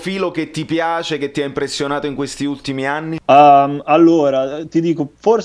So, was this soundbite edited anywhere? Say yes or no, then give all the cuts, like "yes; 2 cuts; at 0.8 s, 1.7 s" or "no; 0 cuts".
yes; 1 cut; at 3.2 s